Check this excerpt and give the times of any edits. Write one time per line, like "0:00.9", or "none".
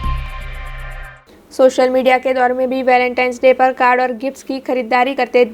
none